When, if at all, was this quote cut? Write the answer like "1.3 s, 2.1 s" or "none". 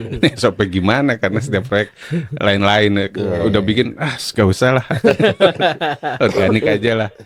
none